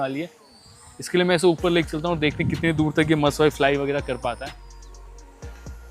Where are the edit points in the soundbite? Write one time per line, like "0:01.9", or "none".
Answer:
0:04.5